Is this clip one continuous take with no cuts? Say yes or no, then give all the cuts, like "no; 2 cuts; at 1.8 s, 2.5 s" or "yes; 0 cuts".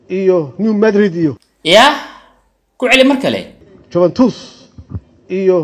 no; 1 cut; at 1.4 s